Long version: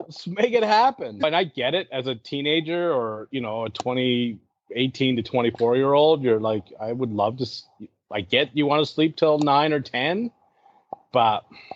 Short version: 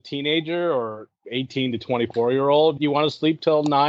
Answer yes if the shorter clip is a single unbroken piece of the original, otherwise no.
no